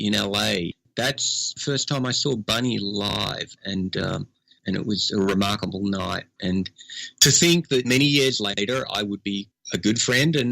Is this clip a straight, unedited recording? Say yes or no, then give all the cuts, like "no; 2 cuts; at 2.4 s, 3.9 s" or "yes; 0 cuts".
no; 3 cuts; at 0.8 s, 4.6 s, 9.6 s